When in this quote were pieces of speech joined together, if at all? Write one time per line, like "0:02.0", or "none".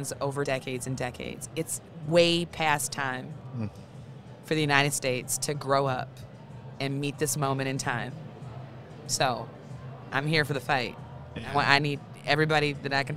none